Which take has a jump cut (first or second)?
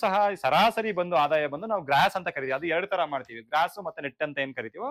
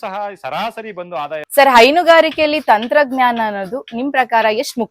second